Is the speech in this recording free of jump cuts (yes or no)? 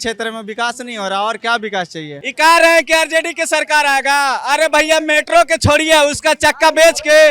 no